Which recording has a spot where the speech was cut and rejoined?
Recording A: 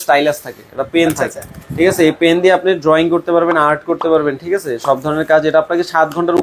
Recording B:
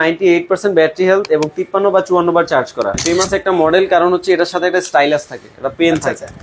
B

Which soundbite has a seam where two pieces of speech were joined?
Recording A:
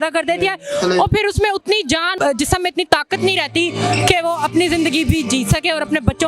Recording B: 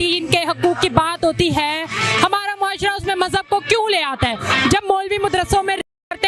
A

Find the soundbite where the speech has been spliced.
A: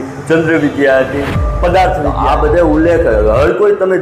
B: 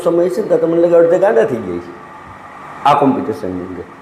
A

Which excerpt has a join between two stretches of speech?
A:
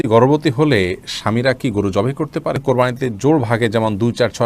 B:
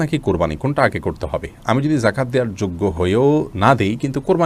A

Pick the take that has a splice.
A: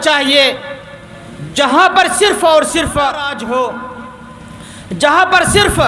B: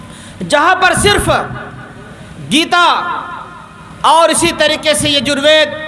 A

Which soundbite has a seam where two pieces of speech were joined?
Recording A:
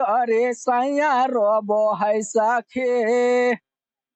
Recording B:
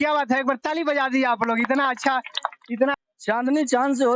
B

